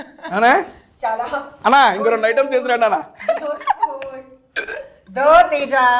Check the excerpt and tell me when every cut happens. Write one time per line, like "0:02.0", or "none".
none